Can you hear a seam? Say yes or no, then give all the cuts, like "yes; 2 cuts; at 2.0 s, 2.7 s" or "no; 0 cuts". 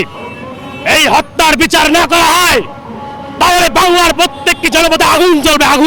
no; 0 cuts